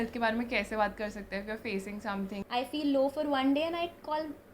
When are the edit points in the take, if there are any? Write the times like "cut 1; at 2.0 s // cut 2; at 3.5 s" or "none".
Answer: cut 1; at 2.4 s